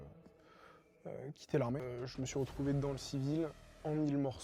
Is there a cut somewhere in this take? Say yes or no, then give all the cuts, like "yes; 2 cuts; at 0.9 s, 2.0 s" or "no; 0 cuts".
yes; 1 cut; at 1.8 s